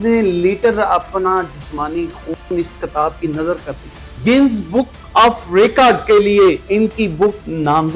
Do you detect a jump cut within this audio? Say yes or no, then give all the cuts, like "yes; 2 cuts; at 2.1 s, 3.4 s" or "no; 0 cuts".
yes; 2 cuts; at 4.1 s, 7.0 s